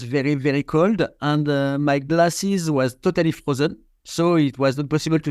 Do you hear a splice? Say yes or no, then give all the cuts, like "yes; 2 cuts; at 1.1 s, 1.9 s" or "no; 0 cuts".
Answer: no; 0 cuts